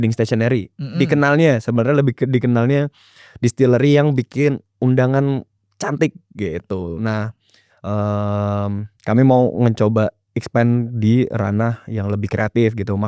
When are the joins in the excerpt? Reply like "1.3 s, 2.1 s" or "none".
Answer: none